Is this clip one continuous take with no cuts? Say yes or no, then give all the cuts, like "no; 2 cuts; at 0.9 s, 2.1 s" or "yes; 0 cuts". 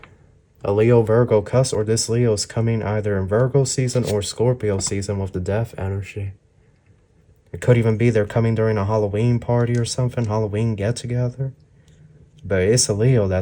yes; 0 cuts